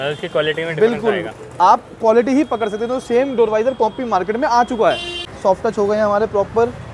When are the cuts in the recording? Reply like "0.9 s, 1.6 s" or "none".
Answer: 5.3 s